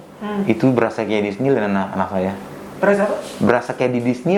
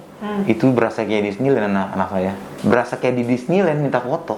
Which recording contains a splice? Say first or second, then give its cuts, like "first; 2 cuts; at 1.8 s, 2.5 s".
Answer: second; 1 cut; at 2.5 s